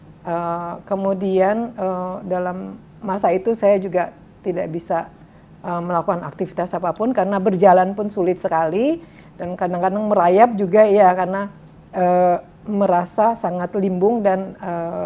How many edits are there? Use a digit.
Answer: 0